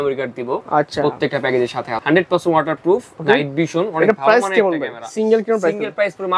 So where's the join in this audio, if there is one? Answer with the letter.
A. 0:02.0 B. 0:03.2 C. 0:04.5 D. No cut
A